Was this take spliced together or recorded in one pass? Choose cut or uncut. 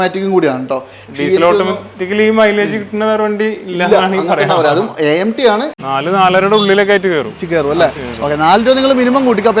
cut